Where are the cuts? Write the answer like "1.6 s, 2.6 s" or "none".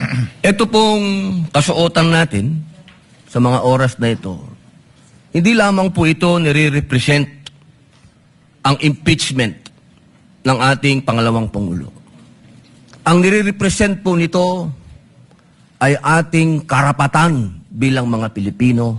none